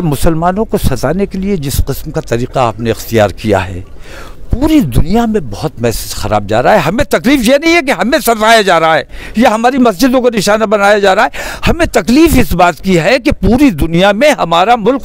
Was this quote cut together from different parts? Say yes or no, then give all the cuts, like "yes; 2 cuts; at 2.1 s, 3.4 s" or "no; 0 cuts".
no; 0 cuts